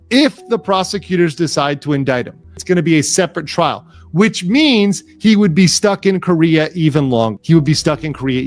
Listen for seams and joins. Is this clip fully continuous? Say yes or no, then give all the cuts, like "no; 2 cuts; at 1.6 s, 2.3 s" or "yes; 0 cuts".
no; 2 cuts; at 2.5 s, 7.4 s